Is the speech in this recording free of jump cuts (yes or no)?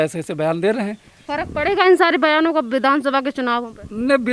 yes